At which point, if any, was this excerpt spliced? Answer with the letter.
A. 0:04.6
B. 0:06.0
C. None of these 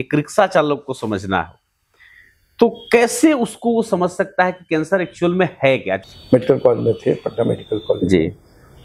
B